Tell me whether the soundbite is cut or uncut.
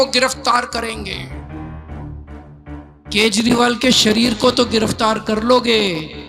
cut